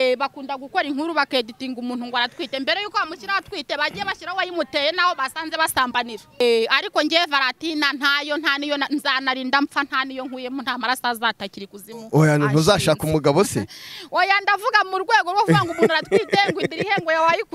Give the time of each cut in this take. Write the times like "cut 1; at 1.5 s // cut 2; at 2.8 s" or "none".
cut 1; at 6.4 s